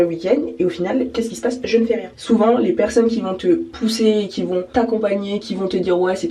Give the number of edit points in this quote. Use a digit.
3